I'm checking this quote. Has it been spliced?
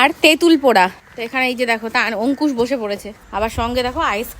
yes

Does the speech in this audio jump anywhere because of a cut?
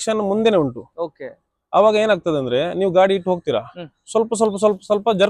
no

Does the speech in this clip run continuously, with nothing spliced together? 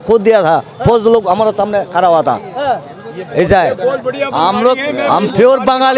yes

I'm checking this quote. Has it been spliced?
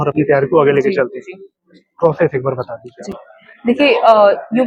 no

